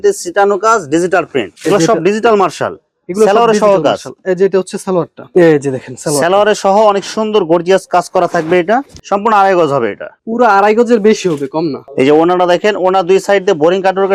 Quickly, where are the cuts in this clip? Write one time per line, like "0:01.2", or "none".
none